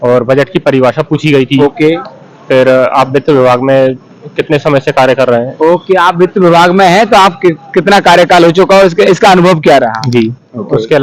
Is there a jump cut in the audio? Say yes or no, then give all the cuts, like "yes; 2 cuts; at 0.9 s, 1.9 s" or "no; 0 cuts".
no; 0 cuts